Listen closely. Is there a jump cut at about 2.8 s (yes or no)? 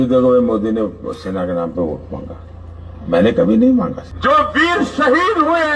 no